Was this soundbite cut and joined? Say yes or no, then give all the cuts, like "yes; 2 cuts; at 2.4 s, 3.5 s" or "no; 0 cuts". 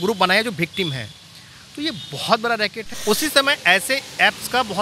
yes; 1 cut; at 2.9 s